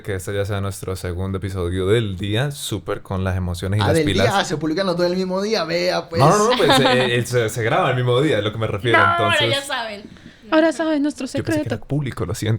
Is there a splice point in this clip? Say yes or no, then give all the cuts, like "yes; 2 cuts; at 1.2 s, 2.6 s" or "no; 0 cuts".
no; 0 cuts